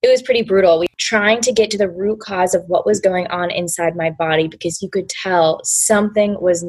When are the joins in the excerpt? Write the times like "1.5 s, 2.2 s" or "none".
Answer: 0.9 s